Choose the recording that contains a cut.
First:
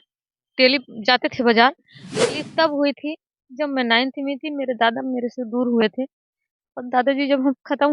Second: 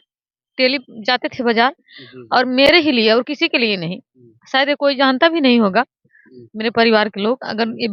first; 1 cut; at 2.2 s

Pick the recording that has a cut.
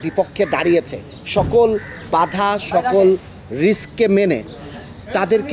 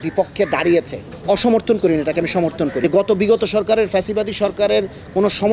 second; 2 cuts; at 1.1 s, 2.8 s

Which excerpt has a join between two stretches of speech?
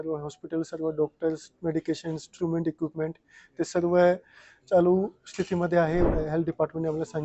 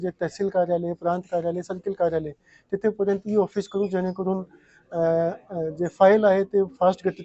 first; 1 cut; at 6.1 s

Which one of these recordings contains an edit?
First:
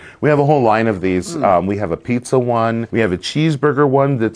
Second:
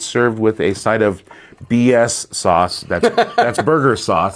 first; 1 cut; at 2.9 s

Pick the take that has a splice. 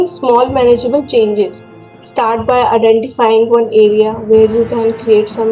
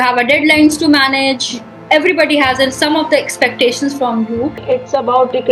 second; 1 cut; at 4.6 s

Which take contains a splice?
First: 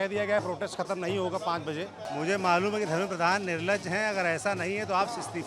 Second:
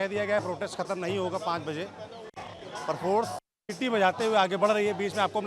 first; 1 cut; at 2.0 s

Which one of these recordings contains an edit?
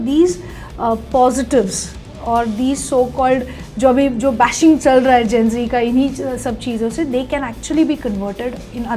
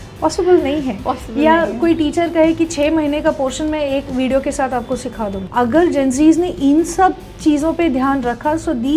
second; 1 cut; at 5.4 s

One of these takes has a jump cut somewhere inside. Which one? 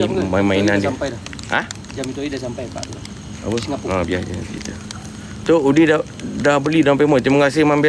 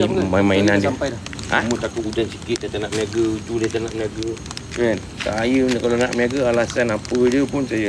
second; 1 cut; at 1.6 s

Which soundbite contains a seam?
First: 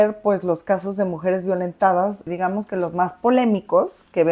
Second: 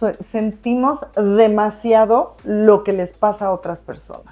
first; 1 cut; at 2.3 s

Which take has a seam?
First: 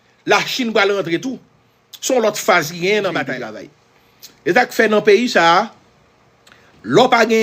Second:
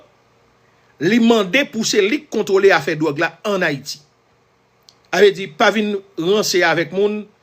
first; 1 cut; at 3.4 s

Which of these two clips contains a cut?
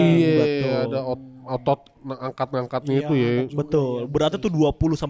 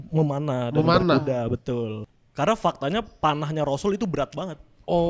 second; 1 cut; at 2.0 s

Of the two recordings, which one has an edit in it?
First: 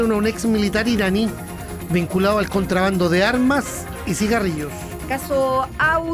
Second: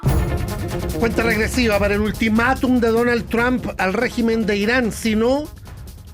second; 1 cut; at 1.0 s

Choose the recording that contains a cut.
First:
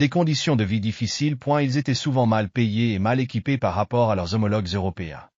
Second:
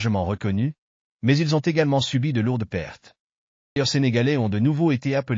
second; 1 cut; at 3.8 s

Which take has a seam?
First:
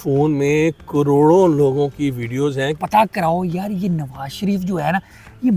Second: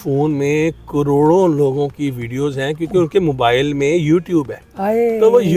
first; 1 cut; at 2.7 s

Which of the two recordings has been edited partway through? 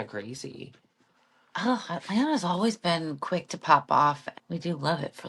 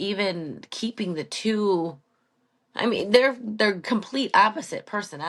first; 1 cut; at 4.3 s

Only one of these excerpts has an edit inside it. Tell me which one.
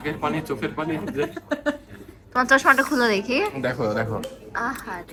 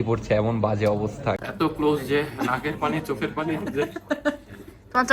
second; 1 cut; at 1.4 s

